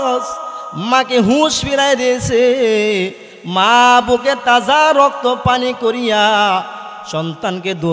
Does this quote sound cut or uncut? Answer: uncut